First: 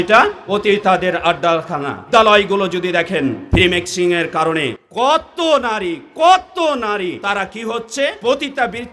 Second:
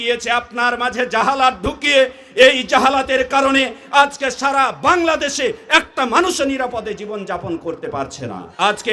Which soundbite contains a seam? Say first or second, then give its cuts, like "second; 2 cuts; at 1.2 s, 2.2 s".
first; 5 cuts; at 2.1 s, 3.4 s, 4.8 s, 7.2 s, 8.2 s